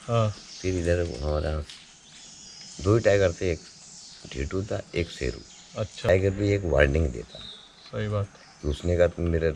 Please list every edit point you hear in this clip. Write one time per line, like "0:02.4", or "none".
0:06.1